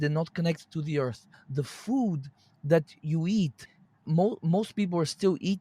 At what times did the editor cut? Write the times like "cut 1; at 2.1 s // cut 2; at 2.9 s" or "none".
cut 1; at 1.4 s // cut 2; at 4.1 s